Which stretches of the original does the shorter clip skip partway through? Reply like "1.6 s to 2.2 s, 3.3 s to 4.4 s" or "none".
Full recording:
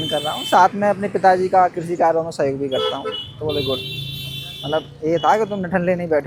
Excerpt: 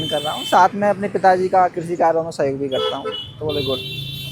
none